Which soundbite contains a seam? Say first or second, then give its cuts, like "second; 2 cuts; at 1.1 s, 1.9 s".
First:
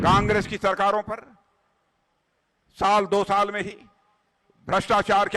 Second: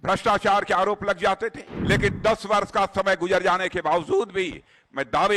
second; 1 cut; at 1.7 s